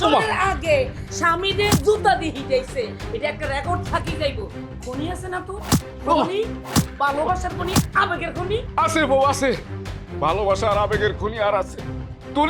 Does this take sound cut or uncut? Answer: uncut